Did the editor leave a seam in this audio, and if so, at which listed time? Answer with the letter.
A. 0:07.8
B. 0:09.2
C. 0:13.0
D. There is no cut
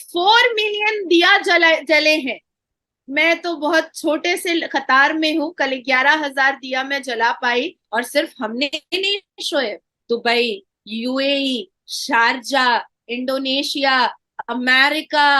A